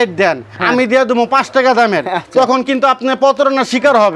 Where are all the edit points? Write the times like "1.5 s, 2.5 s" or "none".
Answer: none